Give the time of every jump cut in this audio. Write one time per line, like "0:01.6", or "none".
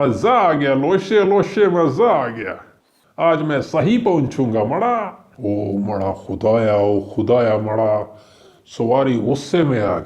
0:05.3